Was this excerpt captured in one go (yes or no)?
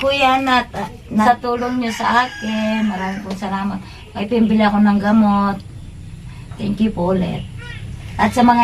no